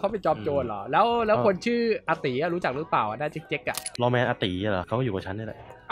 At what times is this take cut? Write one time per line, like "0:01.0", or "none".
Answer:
0:03.9
0:04.8